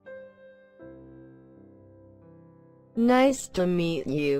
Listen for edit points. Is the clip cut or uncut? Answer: cut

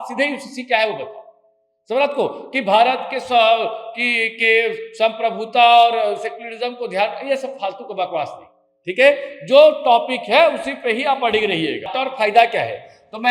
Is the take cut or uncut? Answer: cut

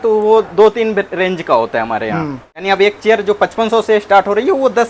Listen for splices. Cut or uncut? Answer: cut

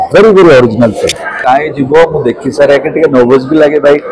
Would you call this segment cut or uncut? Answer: cut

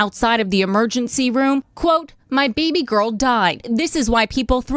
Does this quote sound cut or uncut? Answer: cut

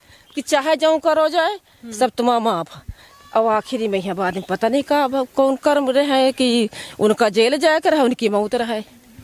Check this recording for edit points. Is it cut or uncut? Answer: uncut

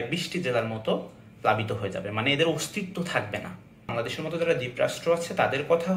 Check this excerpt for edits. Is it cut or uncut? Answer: cut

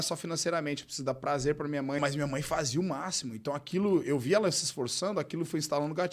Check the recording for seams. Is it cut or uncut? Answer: cut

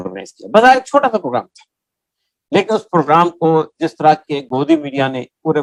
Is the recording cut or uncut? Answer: uncut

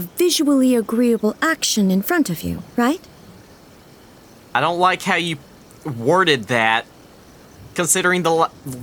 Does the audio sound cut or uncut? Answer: uncut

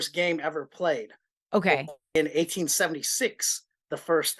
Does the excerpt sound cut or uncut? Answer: cut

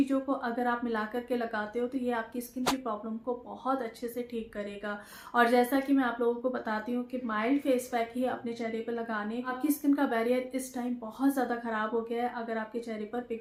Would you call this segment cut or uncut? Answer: uncut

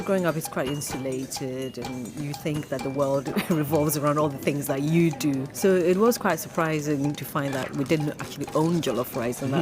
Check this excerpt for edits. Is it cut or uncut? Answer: cut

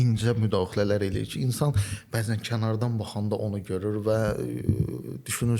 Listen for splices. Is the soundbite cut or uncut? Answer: uncut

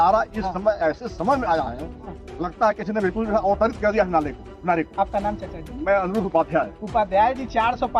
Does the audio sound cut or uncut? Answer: uncut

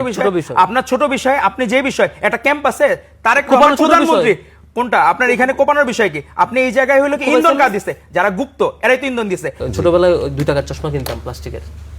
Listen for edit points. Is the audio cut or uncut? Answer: cut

